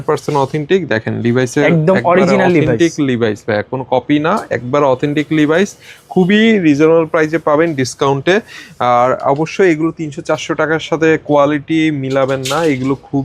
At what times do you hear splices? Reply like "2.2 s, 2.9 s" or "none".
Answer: none